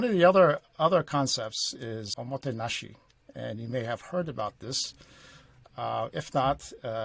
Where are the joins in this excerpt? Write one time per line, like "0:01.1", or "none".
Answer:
0:02.1